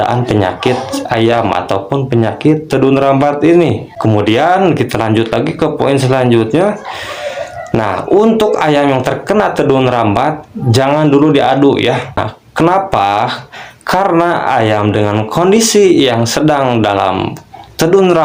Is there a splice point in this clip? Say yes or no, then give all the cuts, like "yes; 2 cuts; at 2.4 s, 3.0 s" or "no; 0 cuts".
no; 0 cuts